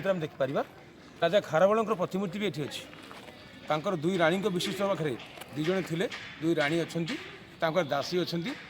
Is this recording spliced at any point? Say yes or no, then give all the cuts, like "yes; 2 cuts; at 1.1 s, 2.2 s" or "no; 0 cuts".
yes; 1 cut; at 1.2 s